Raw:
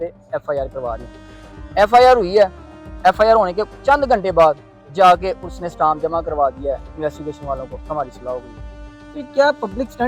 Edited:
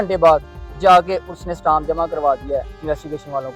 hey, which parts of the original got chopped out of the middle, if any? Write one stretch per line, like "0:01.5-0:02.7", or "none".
none